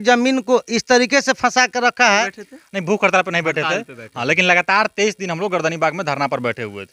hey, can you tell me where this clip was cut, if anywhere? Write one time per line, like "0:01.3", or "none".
0:02.0